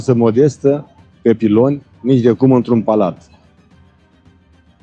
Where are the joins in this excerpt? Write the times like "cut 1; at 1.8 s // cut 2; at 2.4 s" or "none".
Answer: none